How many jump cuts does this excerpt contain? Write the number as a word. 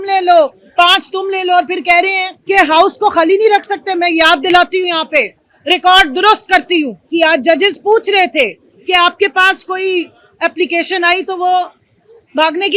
two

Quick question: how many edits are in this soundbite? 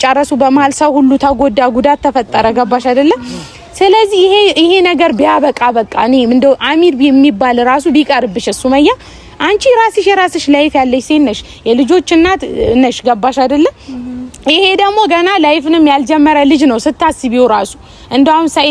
zero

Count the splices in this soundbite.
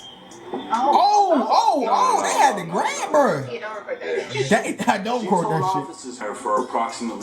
one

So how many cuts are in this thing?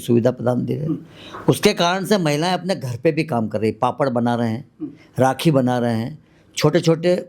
zero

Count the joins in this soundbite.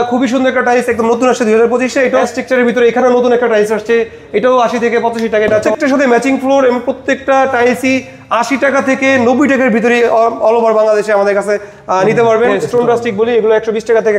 three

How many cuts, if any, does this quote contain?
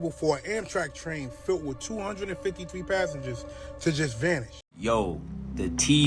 one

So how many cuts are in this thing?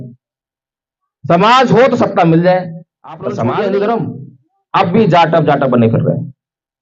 one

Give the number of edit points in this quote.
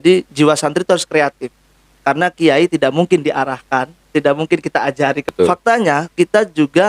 one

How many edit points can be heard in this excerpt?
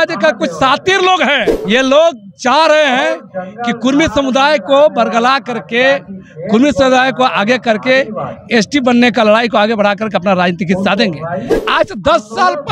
two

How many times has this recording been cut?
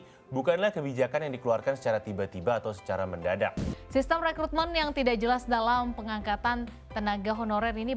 one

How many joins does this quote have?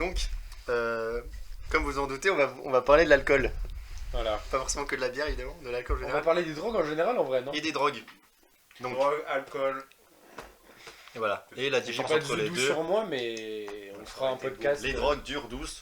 zero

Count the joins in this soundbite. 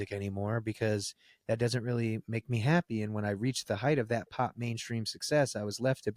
zero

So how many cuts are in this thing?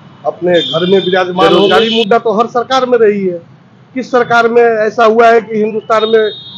one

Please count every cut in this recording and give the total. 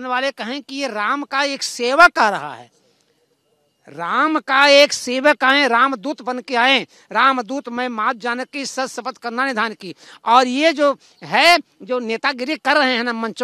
zero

